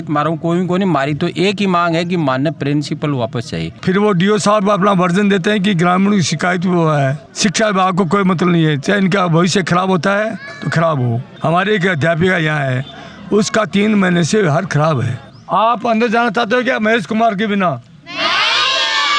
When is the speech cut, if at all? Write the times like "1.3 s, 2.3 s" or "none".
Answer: 3.7 s, 7.3 s, 11.3 s, 15.3 s